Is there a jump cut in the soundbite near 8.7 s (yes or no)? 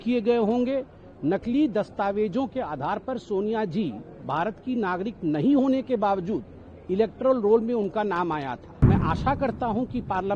yes